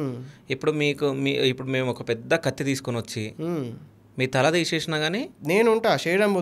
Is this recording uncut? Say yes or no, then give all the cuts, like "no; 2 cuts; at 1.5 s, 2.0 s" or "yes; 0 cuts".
no; 1 cut; at 5.3 s